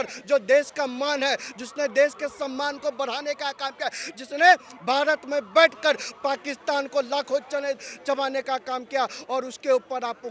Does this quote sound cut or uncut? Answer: uncut